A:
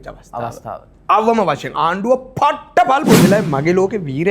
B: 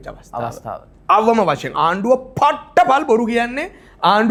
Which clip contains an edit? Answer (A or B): A